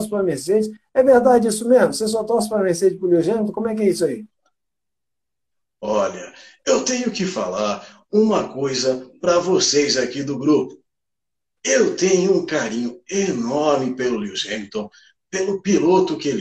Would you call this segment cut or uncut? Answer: uncut